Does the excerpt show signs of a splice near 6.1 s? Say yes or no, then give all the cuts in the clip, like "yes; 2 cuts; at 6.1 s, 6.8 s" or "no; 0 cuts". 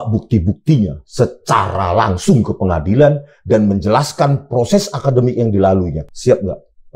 yes; 1 cut; at 6.1 s